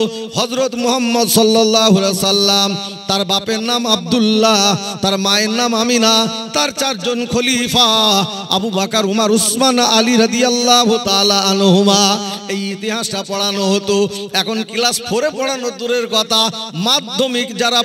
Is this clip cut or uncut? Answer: uncut